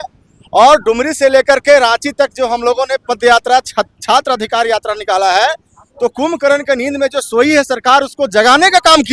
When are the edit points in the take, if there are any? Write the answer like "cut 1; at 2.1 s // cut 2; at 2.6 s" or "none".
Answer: none